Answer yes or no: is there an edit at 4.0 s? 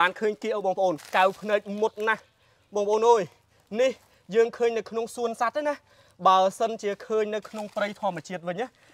no